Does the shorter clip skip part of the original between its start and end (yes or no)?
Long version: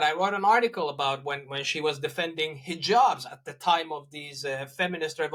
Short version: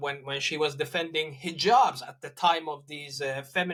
no